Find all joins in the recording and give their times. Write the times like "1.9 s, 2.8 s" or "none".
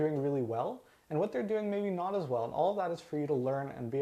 none